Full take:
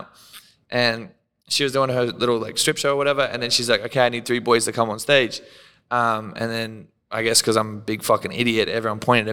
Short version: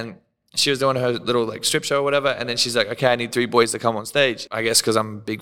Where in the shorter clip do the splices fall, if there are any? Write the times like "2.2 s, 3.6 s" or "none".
4.5 s